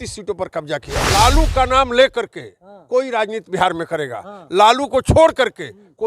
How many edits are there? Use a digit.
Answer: 1